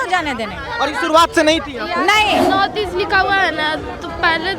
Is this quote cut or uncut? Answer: cut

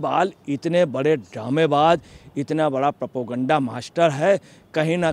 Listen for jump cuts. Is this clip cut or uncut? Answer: uncut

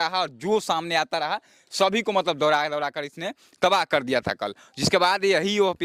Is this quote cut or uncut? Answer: uncut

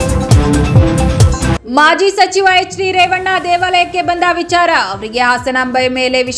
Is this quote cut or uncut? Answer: uncut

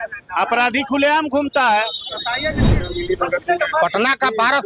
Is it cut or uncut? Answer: cut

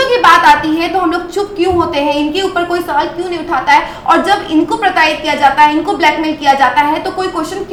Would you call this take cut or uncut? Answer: uncut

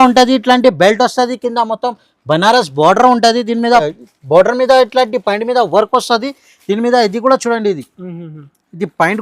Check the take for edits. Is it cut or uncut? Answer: cut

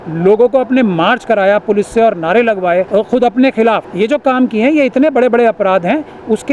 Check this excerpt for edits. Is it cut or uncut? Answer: cut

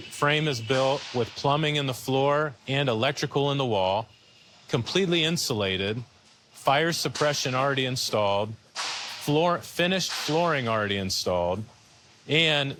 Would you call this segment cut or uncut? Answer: uncut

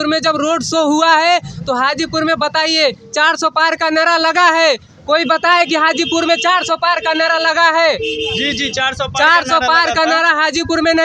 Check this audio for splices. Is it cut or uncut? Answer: uncut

